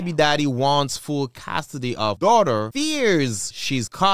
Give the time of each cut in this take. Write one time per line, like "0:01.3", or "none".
none